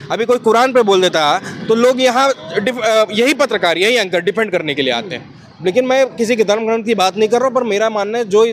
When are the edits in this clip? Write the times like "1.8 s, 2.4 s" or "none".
none